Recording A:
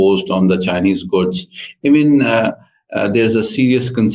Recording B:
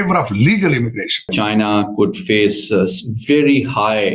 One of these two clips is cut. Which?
B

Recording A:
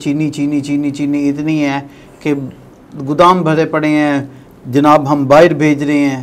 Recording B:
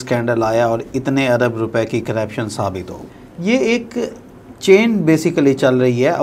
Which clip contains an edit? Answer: B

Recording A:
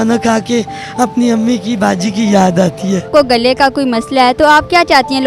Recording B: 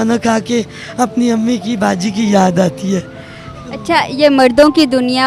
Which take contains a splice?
A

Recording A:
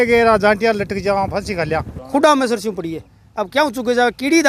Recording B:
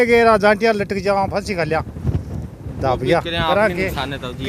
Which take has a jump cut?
A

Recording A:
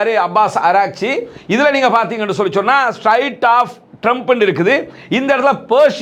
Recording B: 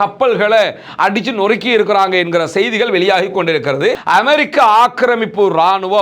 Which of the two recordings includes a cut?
B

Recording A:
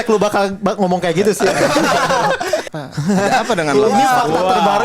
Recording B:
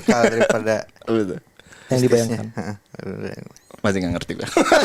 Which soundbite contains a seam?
A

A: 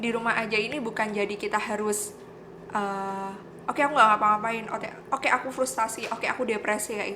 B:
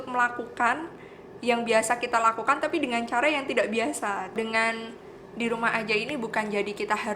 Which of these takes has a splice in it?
B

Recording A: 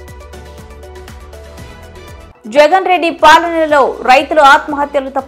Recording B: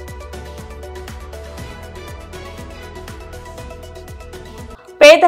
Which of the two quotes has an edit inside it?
A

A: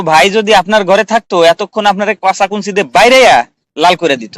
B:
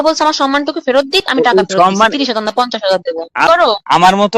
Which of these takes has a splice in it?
B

